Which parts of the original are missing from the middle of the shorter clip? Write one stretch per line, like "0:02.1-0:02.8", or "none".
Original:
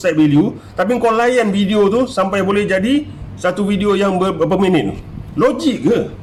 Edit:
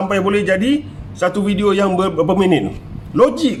none